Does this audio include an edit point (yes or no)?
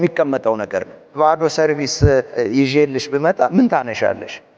yes